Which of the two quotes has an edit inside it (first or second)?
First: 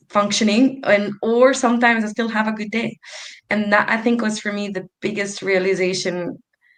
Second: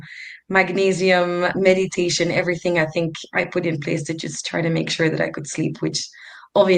second